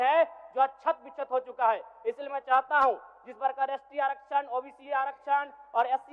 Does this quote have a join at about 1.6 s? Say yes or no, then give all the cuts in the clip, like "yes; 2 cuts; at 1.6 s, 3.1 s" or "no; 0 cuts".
no; 0 cuts